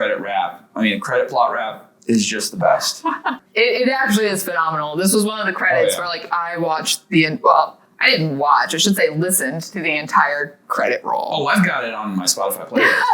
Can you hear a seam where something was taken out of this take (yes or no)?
yes